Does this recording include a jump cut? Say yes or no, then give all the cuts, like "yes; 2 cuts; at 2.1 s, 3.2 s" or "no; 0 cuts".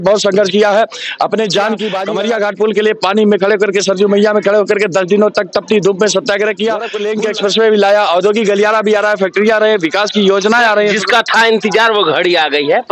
yes; 2 cuts; at 2.0 s, 7.0 s